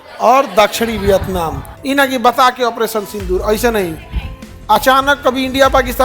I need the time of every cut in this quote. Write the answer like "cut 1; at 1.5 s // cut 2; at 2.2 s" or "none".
cut 1; at 1.7 s